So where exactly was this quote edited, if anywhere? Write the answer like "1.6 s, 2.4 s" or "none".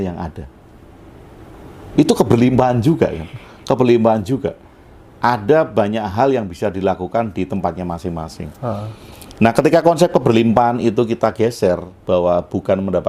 none